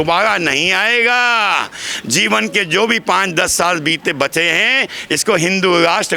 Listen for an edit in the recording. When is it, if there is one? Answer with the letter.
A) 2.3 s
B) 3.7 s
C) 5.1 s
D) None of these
D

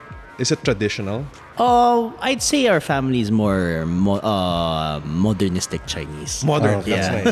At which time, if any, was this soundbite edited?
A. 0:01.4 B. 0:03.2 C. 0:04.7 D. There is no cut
A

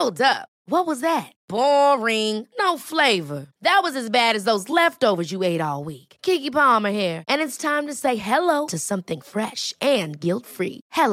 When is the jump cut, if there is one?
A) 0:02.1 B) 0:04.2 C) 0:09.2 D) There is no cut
D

